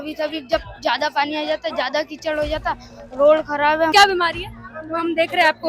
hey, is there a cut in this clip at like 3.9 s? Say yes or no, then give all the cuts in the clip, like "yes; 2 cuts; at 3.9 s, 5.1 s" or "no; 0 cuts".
yes; 1 cut; at 3.9 s